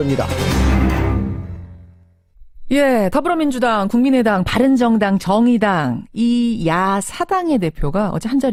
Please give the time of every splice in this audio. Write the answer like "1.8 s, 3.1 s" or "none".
none